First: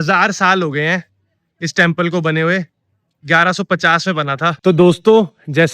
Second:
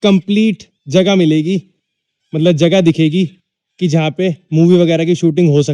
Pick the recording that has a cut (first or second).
first